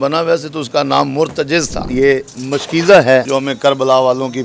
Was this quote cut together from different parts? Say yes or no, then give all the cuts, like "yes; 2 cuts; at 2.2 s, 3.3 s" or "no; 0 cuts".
yes; 2 cuts; at 1.8 s, 3.3 s